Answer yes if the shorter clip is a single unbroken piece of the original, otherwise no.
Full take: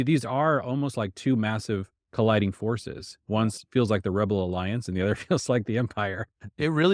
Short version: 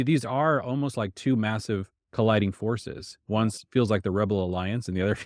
yes